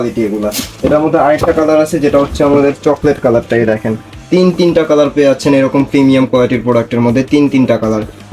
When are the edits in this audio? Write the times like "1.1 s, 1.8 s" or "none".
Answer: none